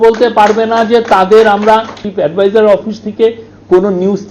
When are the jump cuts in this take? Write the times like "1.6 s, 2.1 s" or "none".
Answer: 2.0 s